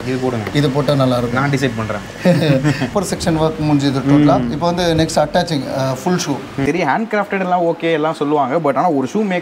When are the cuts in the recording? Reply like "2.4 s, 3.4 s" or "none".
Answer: 2.9 s, 6.6 s